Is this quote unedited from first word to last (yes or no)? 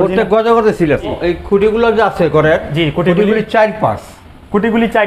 no